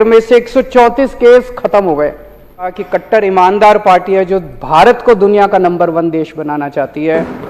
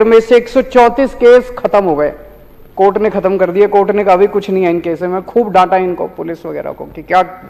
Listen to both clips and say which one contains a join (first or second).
first